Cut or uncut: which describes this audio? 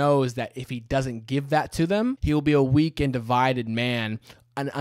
cut